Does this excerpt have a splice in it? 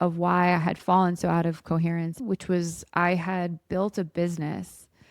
yes; 1 cut; at 2.2 s

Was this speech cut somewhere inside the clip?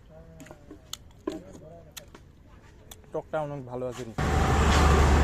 yes; 1 cut; at 4.2 s

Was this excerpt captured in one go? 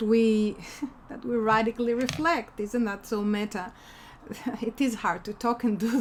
yes; 0 cuts

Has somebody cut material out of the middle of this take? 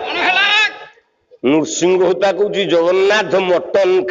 no; 0 cuts

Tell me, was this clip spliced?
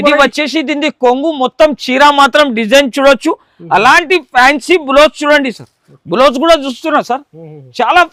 no; 0 cuts

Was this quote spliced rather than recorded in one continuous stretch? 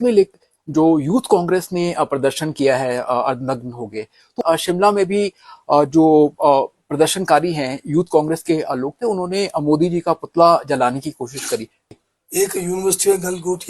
yes; 2 cuts; at 4.4 s, 11.9 s

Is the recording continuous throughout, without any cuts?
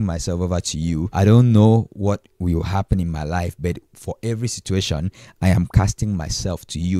no; 1 cut; at 1.1 s

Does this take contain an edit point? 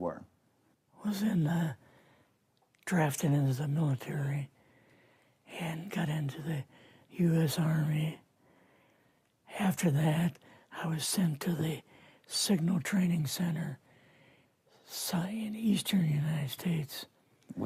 yes; 1 cut; at 3.6 s

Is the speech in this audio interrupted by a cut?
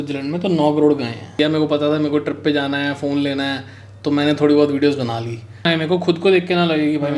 yes; 2 cuts; at 1.4 s, 5.7 s

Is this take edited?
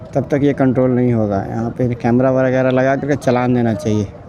no; 0 cuts

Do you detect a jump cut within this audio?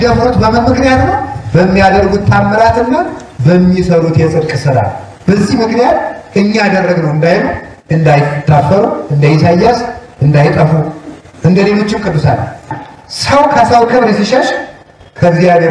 yes; 1 cut; at 12.7 s

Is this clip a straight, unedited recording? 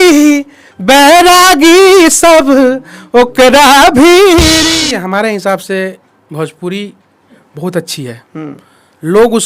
no; 1 cut; at 4.7 s

